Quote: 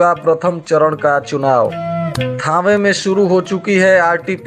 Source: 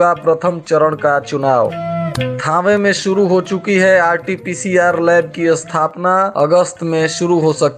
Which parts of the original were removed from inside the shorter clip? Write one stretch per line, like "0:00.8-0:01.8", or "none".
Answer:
none

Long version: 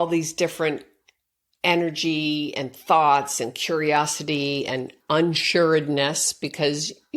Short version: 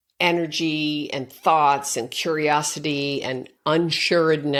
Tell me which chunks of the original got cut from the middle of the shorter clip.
none

